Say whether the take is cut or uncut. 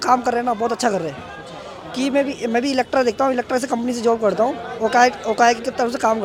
uncut